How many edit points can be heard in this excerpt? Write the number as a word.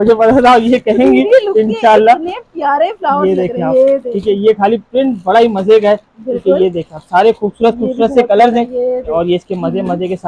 one